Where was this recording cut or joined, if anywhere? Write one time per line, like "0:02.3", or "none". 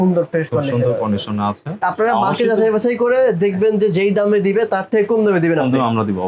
0:01.8